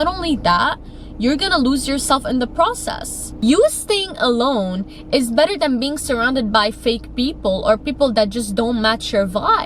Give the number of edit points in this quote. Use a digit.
1